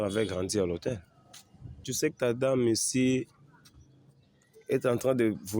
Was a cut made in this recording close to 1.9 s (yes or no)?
yes